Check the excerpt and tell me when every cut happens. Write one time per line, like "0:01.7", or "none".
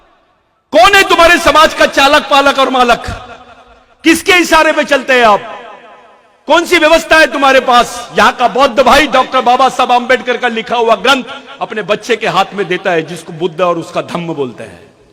none